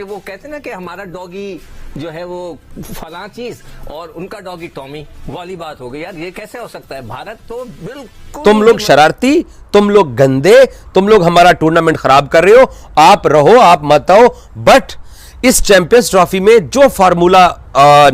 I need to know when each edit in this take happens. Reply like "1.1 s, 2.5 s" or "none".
8.3 s